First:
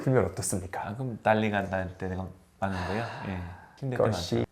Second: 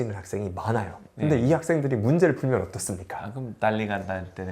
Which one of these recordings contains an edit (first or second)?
second